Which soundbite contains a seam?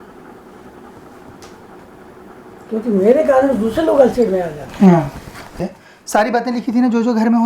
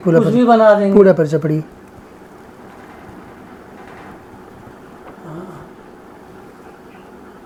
first; 1 cut; at 5.6 s

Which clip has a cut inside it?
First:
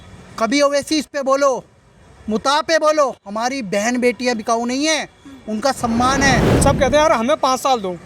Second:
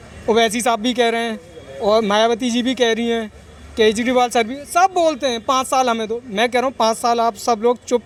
first; 1 cut; at 6.5 s

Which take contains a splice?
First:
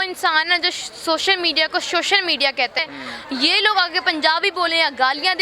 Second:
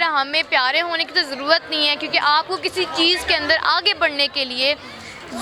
first; 1 cut; at 2.8 s

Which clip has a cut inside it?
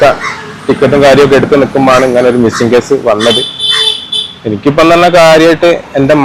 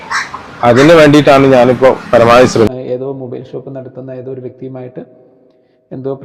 second; 1 cut; at 2.7 s

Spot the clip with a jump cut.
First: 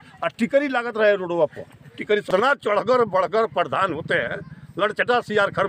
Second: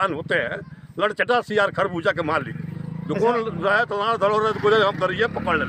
first; 1 cut; at 2.3 s

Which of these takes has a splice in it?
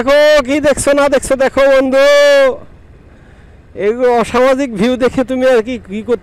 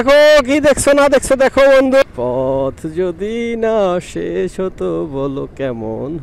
second; 1 cut; at 2.0 s

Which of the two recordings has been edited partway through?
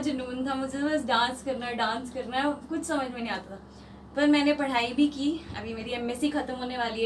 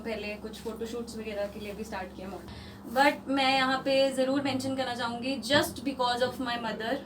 second; 1 cut; at 2.5 s

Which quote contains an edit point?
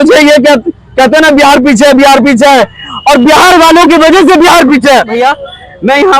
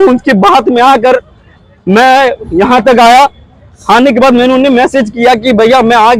first; 1 cut; at 5.1 s

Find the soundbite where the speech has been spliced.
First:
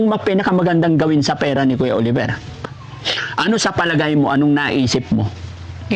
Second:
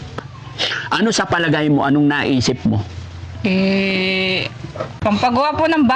second; 1 cut; at 4.8 s

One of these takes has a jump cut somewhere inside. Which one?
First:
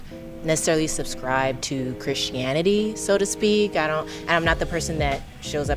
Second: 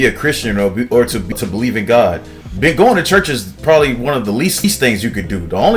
second; 2 cuts; at 1.3 s, 4.6 s

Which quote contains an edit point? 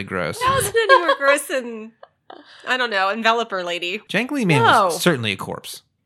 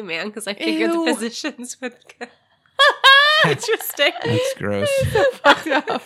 first; 1 cut; at 4.0 s

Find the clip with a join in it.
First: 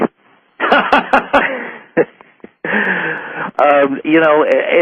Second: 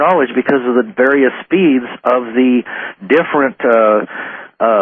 first; 1 cut; at 2.1 s

